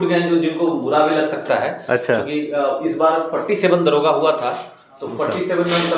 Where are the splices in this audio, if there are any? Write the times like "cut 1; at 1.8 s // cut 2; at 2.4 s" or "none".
none

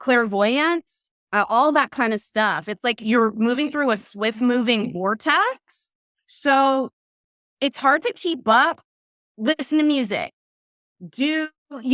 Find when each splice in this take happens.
none

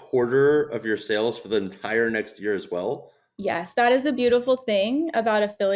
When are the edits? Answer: none

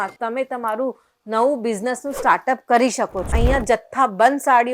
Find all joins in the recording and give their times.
cut 1; at 3.3 s

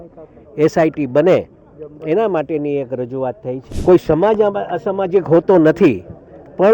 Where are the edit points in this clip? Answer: cut 1; at 3.7 s

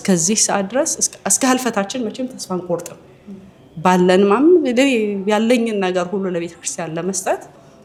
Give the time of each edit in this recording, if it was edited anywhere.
none

